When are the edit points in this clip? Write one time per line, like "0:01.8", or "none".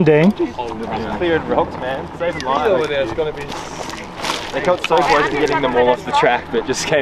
none